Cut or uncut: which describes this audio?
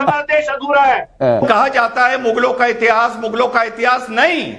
cut